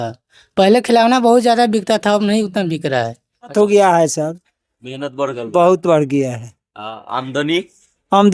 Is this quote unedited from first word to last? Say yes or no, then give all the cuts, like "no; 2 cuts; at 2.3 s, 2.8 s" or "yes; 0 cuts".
no; 1 cut; at 3.5 s